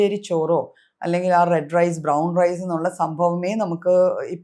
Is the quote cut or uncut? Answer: uncut